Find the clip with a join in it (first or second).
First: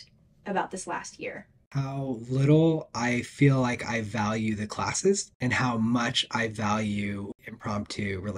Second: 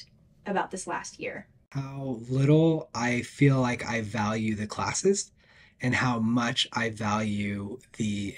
first